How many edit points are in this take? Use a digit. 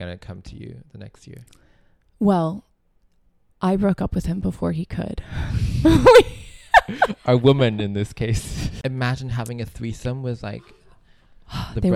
1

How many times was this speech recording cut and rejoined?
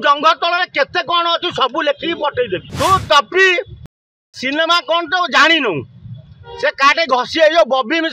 1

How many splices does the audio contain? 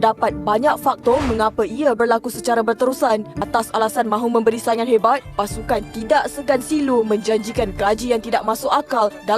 1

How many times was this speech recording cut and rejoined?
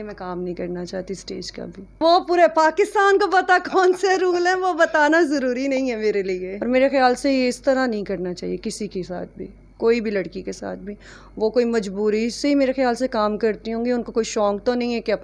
2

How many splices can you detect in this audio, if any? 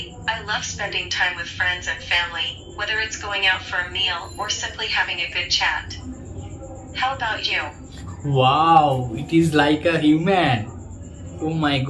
0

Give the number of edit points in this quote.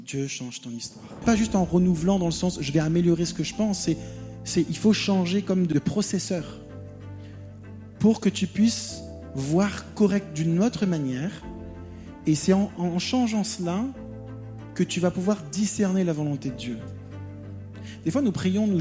2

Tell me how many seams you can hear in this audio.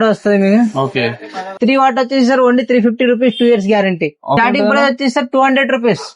2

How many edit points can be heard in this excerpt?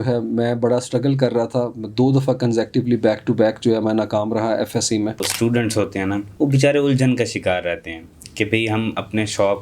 2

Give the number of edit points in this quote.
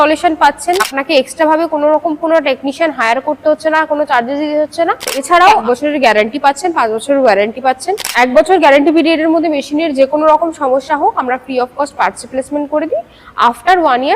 3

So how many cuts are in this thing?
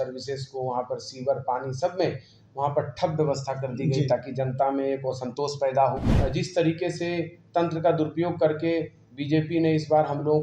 1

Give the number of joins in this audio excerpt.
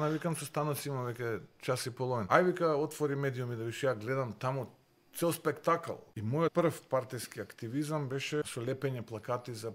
3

